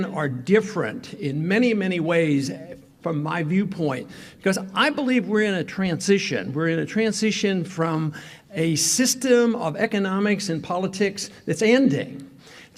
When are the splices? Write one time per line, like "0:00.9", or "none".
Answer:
none